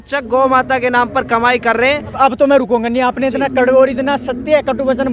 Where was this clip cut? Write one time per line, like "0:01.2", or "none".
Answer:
0:02.2